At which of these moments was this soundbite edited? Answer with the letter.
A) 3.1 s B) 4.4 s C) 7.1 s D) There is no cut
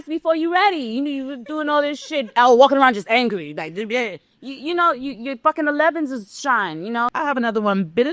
C